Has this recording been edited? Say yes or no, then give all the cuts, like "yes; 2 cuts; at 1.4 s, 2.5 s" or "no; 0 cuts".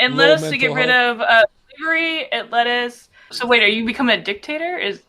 yes; 1 cut; at 3.3 s